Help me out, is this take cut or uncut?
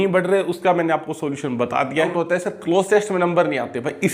cut